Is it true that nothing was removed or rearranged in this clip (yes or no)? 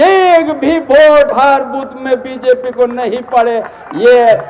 yes